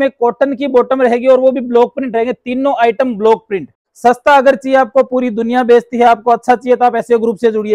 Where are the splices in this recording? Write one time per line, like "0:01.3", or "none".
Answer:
0:03.8